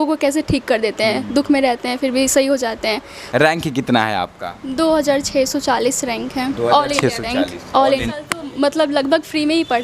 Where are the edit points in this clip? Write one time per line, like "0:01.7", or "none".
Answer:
0:03.2
0:08.0